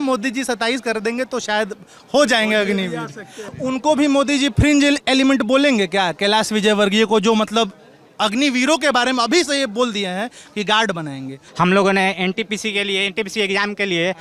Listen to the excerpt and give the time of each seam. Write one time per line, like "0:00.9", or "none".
0:03.3
0:11.4